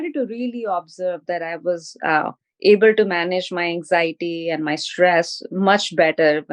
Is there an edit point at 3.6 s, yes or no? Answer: no